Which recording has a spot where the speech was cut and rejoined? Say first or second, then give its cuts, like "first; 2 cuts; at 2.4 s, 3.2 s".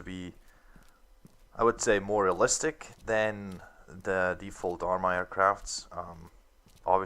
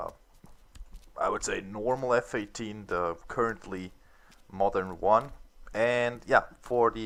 first; 1 cut; at 1.1 s